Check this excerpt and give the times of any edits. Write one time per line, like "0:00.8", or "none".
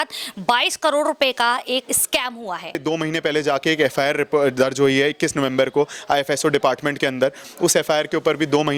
0:02.8